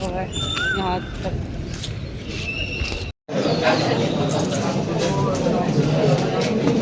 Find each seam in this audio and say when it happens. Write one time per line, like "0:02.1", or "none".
none